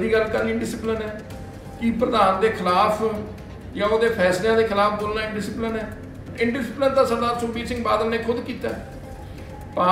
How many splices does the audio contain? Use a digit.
1